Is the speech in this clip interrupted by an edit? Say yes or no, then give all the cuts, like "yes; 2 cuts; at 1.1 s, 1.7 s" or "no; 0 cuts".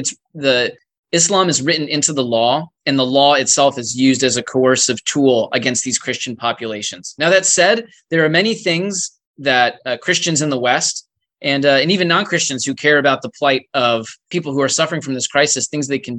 yes; 1 cut; at 14.3 s